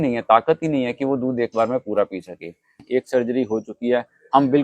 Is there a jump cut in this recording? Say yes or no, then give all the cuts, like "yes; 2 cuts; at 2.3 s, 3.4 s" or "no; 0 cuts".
yes; 1 cut; at 2.8 s